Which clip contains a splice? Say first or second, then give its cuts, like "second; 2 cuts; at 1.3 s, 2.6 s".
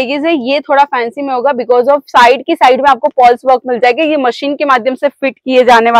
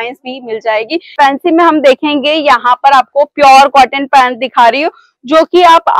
second; 1 cut; at 1.1 s